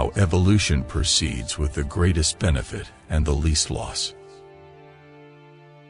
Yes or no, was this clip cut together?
yes